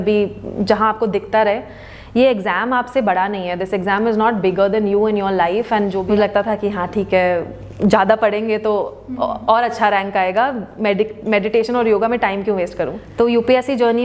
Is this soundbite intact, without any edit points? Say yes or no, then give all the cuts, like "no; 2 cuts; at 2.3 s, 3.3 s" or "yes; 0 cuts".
no; 2 cuts; at 6.0 s, 13.0 s